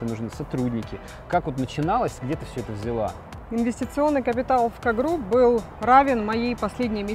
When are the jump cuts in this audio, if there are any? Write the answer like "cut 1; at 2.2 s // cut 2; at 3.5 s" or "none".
cut 1; at 3.3 s // cut 2; at 5.7 s